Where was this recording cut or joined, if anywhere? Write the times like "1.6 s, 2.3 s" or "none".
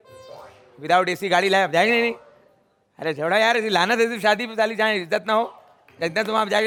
none